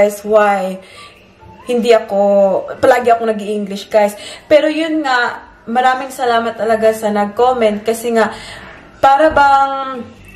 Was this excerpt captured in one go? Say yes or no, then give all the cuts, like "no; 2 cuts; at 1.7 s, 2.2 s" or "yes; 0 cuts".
yes; 0 cuts